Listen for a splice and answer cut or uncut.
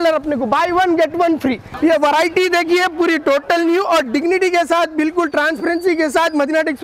cut